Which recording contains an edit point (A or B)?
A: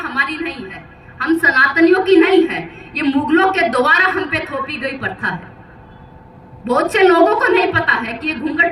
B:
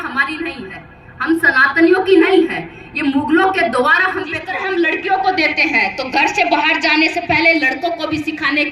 B